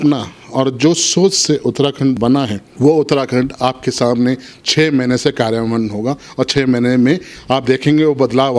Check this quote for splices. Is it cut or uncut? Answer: cut